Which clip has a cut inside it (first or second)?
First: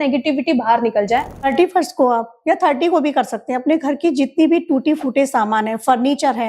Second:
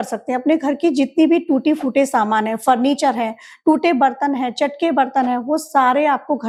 first